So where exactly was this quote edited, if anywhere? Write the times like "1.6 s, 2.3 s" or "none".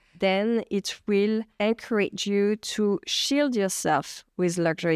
1.5 s